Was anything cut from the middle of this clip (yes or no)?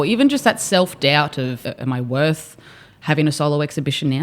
yes